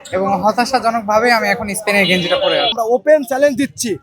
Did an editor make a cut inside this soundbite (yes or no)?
yes